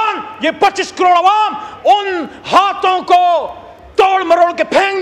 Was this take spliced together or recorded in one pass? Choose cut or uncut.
uncut